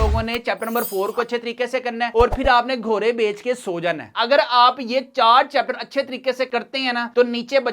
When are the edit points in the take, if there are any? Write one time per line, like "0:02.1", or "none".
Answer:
0:04.1